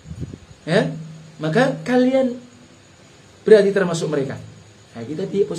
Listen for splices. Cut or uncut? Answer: uncut